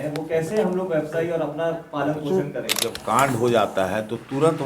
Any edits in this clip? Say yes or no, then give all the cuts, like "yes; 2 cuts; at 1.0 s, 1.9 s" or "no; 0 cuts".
yes; 1 cut; at 2.9 s